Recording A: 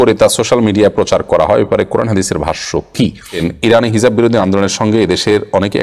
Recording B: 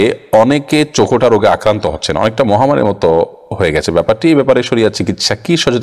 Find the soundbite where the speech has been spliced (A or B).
A